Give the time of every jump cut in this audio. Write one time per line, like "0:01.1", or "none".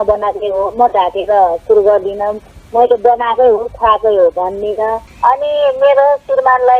0:05.1